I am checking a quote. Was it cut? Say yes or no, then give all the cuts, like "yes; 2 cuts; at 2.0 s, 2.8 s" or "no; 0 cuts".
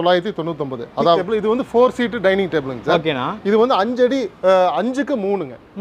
yes; 1 cut; at 1.2 s